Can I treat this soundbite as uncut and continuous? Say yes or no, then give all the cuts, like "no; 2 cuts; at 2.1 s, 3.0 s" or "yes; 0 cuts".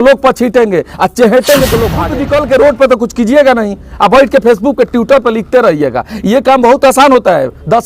no; 1 cut; at 2.1 s